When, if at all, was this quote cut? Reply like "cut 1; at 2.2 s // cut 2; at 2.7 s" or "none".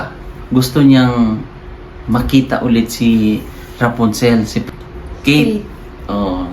cut 1; at 4.6 s